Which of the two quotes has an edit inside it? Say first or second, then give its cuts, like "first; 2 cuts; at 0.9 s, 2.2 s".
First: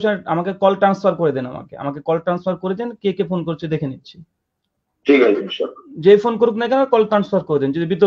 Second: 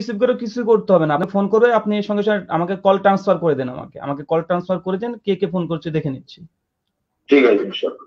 second; 1 cut; at 1.2 s